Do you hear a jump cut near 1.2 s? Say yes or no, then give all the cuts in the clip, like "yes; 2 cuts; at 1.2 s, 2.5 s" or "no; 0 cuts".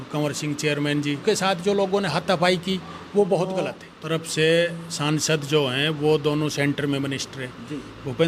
yes; 2 cuts; at 1.2 s, 3.9 s